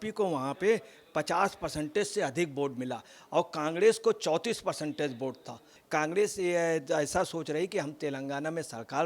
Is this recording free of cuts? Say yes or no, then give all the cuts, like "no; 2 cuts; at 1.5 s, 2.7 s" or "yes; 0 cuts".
no; 1 cut; at 5.7 s